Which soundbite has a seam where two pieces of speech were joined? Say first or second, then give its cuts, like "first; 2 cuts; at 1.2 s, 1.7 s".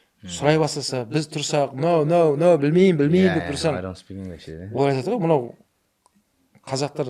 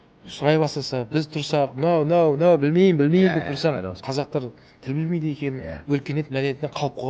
second; 1 cut; at 3.9 s